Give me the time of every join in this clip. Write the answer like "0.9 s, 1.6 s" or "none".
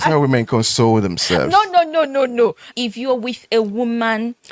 2.7 s